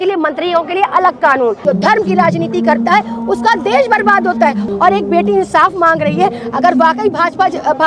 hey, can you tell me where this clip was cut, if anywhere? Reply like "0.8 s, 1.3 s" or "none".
1.6 s, 4.6 s